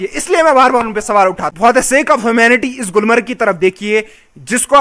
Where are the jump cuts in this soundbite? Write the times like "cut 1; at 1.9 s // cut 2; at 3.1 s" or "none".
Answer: cut 1; at 1.5 s